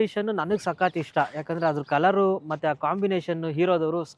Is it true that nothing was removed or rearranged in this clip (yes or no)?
yes